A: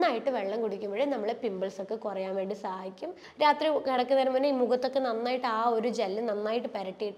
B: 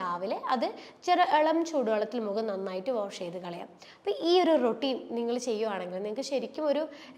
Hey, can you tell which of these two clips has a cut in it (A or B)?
A